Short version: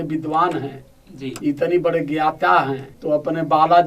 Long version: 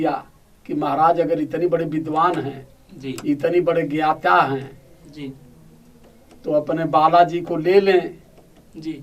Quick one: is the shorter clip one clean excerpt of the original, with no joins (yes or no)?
no